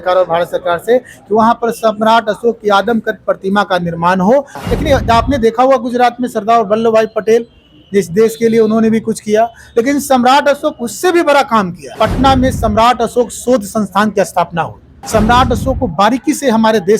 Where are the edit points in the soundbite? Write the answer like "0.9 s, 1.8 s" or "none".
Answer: 4.6 s, 11.8 s, 15.0 s